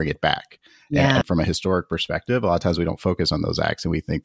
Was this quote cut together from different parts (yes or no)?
yes